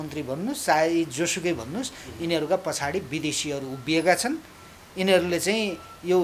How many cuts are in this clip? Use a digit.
0